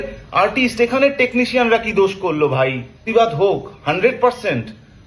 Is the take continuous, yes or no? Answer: no